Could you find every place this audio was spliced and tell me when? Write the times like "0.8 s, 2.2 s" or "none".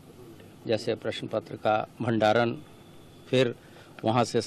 none